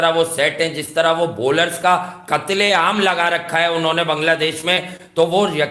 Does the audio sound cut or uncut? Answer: uncut